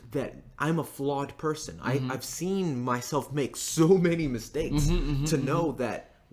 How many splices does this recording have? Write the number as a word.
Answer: zero